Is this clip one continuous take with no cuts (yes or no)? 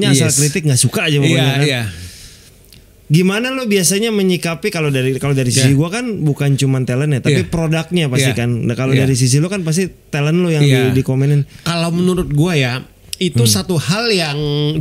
yes